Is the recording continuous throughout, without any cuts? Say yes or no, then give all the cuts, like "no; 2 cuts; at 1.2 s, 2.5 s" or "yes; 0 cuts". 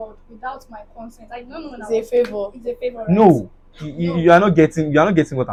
yes; 0 cuts